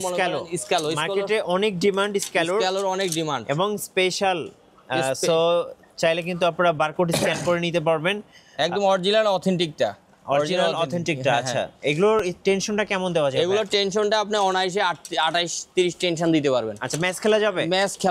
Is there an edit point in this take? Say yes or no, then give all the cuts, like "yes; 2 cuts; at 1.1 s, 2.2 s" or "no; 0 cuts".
no; 0 cuts